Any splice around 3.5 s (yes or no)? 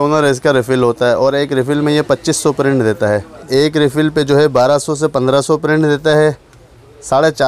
yes